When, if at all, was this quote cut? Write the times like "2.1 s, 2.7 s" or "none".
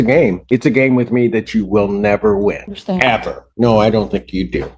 none

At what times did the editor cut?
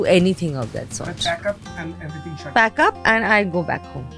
none

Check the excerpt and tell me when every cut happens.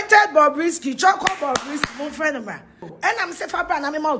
2.9 s

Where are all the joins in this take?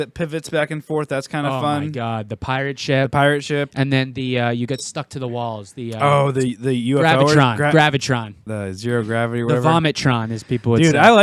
8.4 s

